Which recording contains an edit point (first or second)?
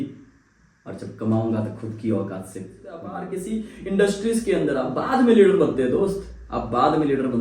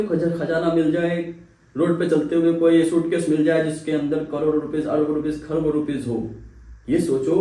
first